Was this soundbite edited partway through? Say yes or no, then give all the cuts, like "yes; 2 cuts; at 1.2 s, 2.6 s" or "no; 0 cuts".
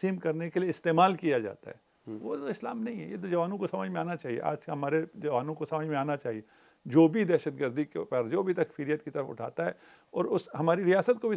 no; 0 cuts